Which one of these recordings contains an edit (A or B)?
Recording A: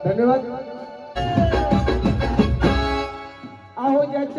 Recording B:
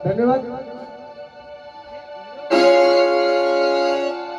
A